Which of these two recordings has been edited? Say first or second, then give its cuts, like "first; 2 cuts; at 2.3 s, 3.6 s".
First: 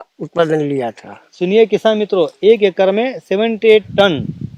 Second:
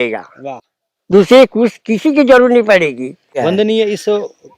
second; 1 cut; at 3.4 s